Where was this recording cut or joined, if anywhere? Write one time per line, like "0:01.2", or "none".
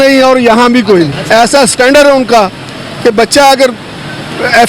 0:01.2